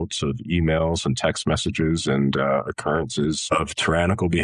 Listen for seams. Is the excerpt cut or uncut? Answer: cut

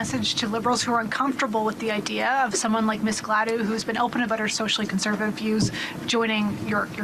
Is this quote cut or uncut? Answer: uncut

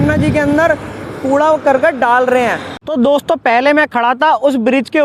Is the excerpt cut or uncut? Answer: uncut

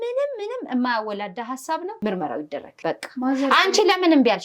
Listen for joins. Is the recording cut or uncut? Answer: cut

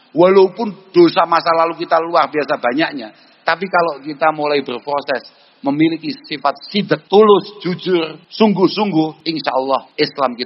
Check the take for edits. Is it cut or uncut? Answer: cut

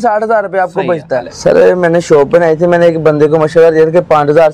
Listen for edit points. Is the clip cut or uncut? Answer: cut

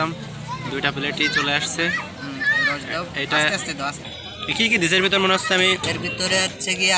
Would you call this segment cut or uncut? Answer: cut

